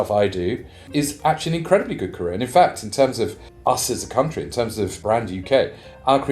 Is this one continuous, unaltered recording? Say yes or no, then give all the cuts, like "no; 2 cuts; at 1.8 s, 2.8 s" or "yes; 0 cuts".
no; 3 cuts; at 0.9 s, 3.4 s, 5.0 s